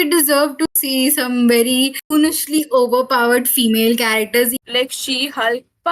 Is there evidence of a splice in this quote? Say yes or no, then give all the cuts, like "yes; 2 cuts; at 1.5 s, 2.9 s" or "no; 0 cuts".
yes; 1 cut; at 4.6 s